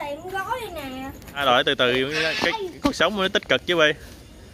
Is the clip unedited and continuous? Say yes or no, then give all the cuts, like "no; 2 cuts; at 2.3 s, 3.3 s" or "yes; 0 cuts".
no; 1 cut; at 1.4 s